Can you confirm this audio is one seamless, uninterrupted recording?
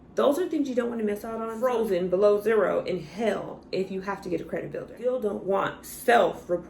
no; 2 cuts; at 1.5 s, 4.9 s

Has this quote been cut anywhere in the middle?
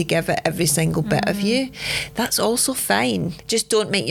no; 0 cuts

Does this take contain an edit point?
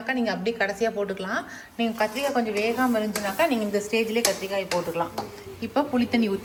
no; 0 cuts

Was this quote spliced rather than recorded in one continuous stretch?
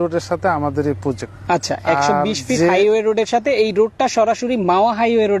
yes; 1 cut; at 1.3 s

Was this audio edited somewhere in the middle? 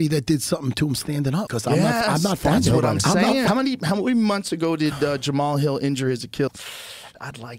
yes; 2 cuts; at 3.5 s, 6.5 s

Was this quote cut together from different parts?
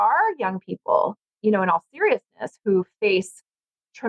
yes; 1 cut; at 1.2 s

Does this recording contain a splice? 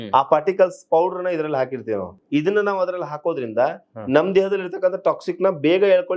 yes; 1 cut; at 2.1 s

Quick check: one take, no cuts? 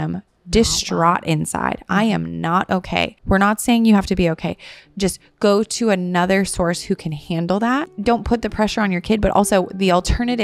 no; 2 cuts; at 3.2 s, 7.9 s

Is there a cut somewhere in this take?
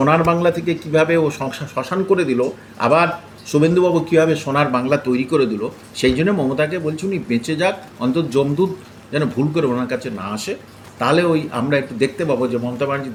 no; 0 cuts

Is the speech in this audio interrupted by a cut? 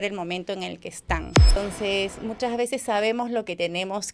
yes; 1 cut; at 1.6 s

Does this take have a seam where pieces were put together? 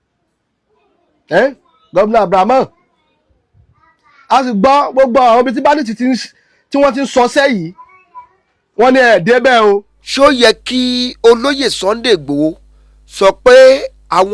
yes; 1 cut; at 10.0 s

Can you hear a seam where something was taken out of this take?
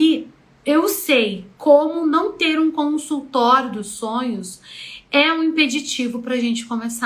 no; 0 cuts

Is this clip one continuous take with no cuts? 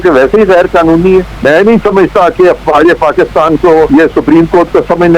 no; 2 cuts; at 1.3 s, 3.9 s

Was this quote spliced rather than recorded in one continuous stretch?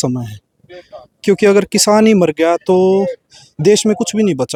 no; 0 cuts

